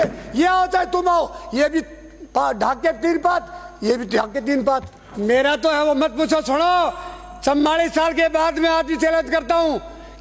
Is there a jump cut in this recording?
yes; 1 cut; at 5.0 s

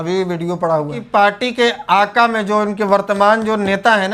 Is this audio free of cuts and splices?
no; 1 cut; at 1.0 s

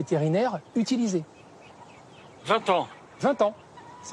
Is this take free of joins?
yes; 0 cuts

